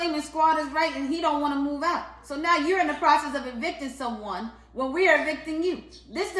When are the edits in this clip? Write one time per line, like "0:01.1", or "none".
none